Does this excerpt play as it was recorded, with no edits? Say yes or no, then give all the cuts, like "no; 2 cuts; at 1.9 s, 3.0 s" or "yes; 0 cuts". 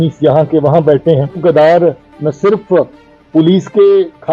no; 1 cut; at 1.4 s